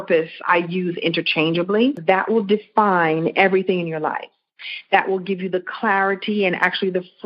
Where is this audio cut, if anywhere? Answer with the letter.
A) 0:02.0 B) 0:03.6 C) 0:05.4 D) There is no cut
A